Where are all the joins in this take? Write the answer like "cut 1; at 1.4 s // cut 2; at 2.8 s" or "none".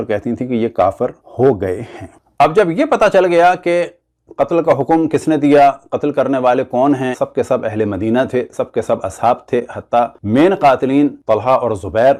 none